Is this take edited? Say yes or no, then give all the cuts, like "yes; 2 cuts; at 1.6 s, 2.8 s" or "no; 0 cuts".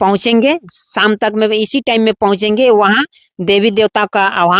no; 0 cuts